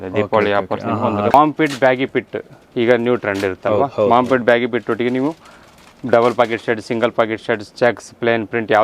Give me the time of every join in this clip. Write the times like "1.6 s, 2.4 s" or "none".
1.3 s